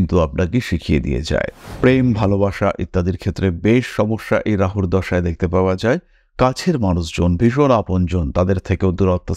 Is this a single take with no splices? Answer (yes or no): yes